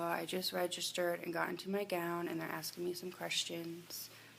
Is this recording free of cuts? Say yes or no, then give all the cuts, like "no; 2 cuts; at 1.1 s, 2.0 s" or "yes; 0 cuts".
yes; 0 cuts